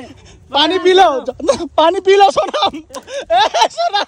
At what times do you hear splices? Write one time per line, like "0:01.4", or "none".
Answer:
none